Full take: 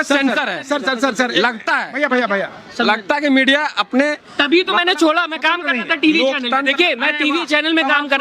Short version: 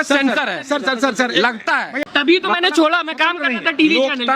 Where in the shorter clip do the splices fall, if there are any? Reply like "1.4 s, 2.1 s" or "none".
2.0 s

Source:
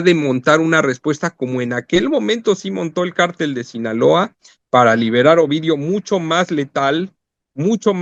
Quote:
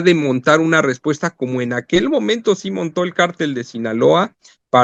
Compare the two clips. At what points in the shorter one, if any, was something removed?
none

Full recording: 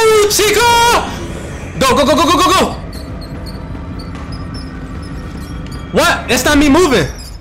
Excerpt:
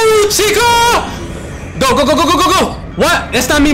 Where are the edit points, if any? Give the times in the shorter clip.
2.8 s

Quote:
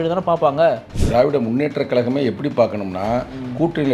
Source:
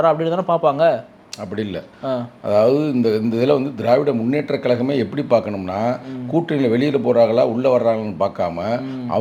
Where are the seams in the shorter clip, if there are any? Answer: 1.0 s

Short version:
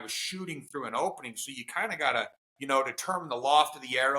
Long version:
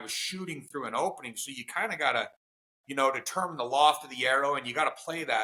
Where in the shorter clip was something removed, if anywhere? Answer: 2.5 s

